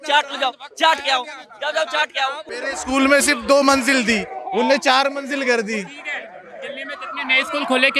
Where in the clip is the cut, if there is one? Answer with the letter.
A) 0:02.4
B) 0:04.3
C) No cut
A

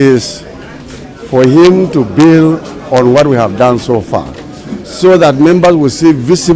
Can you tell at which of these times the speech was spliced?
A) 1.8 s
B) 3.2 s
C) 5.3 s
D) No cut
D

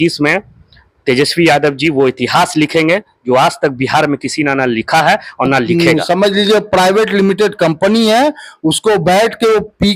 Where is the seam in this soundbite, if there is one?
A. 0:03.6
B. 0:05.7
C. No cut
B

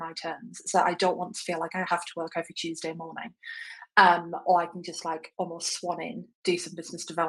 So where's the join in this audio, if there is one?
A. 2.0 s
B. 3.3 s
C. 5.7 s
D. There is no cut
D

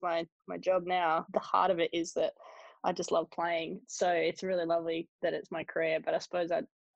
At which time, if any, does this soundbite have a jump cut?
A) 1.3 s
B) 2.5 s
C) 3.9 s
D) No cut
D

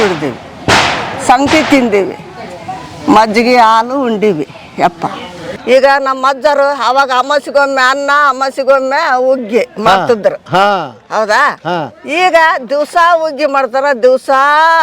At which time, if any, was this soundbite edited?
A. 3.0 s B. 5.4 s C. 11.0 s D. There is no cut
B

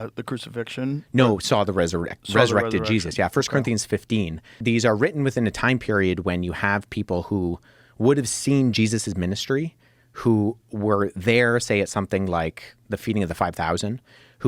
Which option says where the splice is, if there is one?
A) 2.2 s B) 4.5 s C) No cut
B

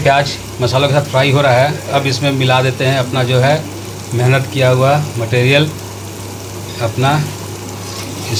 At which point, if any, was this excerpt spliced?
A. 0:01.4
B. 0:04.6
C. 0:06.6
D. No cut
D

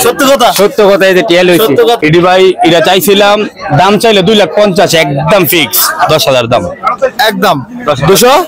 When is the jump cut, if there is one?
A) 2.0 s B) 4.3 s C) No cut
A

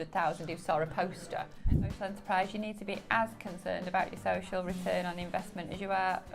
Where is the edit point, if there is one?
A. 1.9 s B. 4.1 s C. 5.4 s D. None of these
A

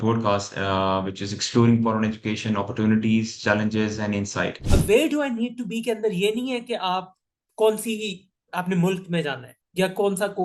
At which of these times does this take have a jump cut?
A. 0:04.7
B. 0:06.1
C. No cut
A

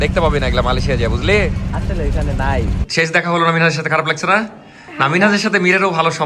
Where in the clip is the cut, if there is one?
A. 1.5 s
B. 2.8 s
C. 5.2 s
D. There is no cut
B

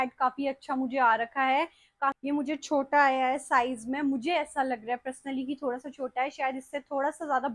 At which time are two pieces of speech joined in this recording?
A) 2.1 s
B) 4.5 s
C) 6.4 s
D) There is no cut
A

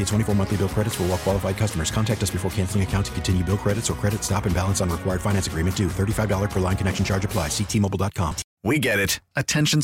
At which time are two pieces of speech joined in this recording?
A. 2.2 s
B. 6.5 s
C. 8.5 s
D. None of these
C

